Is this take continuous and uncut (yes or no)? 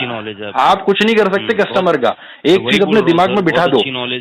yes